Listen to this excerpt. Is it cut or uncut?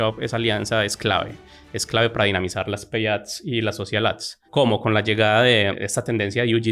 cut